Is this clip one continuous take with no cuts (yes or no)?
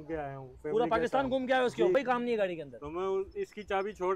no